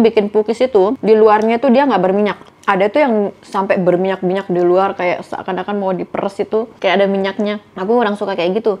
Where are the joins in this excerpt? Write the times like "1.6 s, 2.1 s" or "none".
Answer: 1.0 s